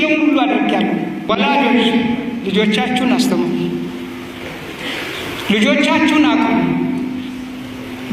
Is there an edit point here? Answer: yes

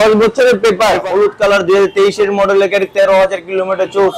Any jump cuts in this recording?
yes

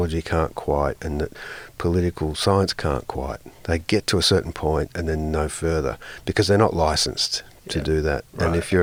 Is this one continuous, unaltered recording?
yes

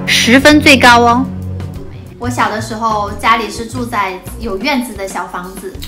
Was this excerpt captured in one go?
no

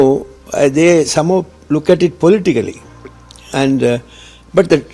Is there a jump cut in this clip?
no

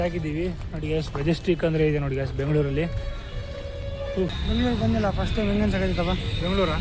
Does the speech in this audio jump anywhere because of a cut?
yes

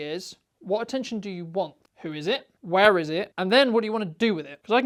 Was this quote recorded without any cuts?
yes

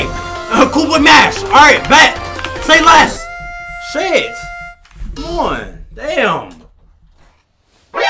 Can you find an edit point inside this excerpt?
no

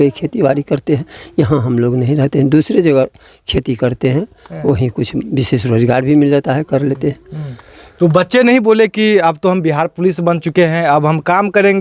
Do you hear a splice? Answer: no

